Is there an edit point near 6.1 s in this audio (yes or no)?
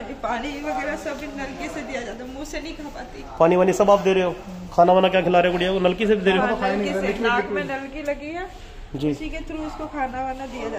no